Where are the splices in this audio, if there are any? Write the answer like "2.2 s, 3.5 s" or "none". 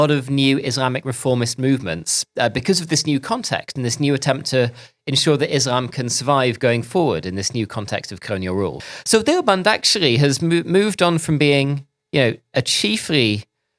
8.8 s